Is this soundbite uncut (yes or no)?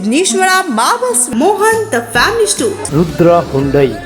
yes